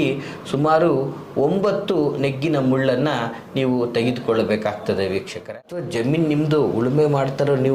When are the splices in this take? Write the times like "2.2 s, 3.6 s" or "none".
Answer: 5.4 s